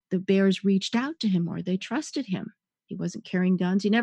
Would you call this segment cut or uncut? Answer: uncut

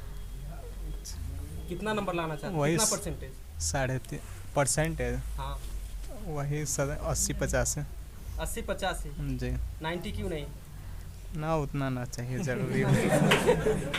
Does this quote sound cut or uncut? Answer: uncut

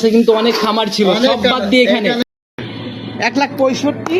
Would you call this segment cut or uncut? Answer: cut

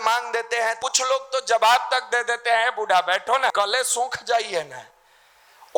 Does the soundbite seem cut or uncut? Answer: cut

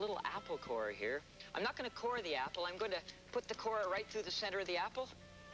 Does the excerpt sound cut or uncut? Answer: uncut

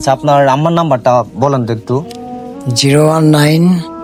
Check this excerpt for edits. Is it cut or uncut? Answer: uncut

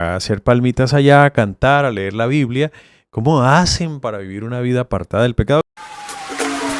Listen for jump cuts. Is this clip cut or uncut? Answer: cut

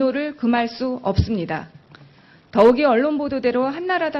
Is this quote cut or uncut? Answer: cut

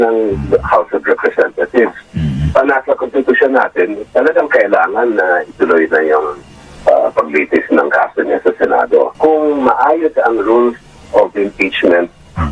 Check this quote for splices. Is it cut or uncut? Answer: cut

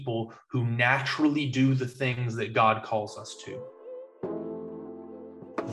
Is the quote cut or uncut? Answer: cut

